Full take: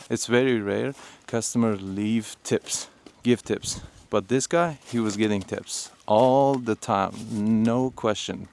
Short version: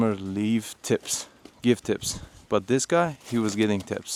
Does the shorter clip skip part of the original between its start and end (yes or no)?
no